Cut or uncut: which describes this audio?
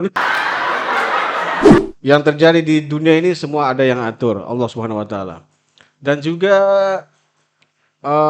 cut